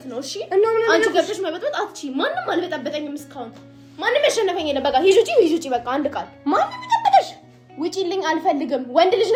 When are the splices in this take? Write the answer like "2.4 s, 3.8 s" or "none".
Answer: none